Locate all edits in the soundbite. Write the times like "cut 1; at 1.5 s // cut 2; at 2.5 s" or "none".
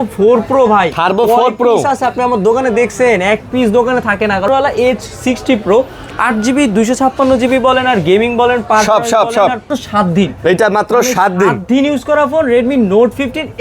cut 1; at 4.5 s // cut 2; at 9.6 s